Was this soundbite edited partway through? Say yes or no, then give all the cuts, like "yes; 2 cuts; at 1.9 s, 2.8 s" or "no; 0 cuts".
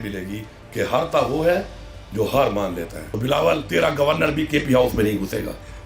yes; 1 cut; at 3.0 s